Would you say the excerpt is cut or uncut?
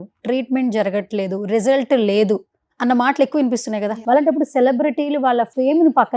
cut